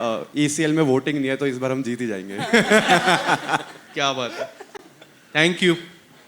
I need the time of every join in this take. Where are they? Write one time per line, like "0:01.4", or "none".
none